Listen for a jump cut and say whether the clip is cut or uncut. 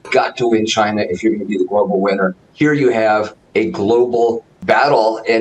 cut